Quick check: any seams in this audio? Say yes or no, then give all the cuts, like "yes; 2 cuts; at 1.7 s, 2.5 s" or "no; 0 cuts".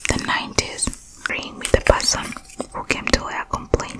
yes; 1 cut; at 1.5 s